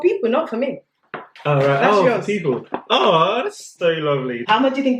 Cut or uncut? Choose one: cut